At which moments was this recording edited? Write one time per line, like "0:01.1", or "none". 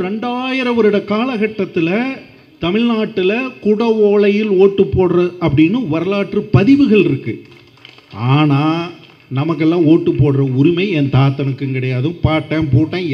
none